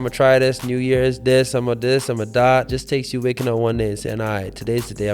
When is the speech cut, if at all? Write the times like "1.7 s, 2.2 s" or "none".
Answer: 2.7 s